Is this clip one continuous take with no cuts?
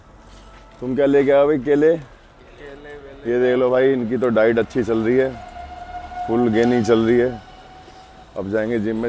yes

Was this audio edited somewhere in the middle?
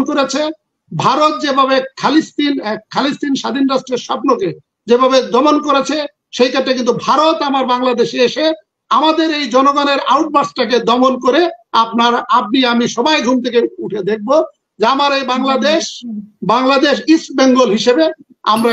no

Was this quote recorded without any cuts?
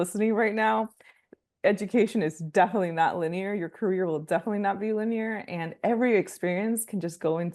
yes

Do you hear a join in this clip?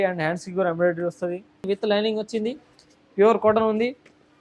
yes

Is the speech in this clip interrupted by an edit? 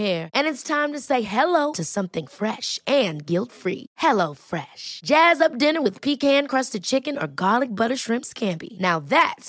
no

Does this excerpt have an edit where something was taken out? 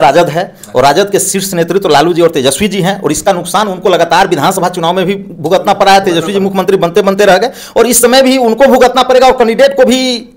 no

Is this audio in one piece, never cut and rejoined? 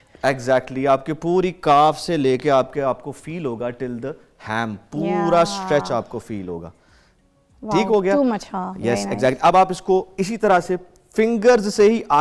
yes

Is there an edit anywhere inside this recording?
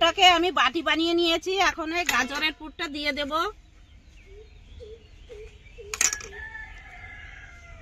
no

